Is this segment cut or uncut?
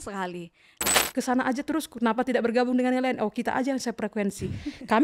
cut